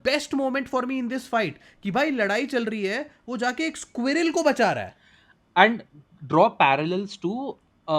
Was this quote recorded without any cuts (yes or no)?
yes